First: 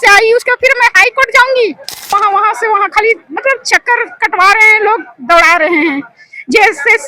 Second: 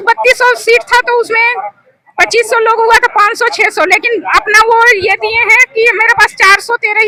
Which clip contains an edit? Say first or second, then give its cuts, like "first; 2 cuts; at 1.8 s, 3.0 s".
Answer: first; 1 cut; at 2.1 s